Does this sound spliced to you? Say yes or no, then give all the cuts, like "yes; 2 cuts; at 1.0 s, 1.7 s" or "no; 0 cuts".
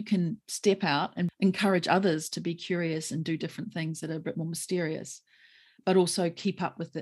yes; 1 cut; at 1.3 s